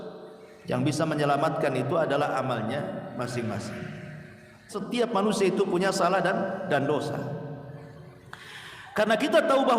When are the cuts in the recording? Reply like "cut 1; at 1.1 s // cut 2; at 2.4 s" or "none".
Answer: cut 1; at 4.8 s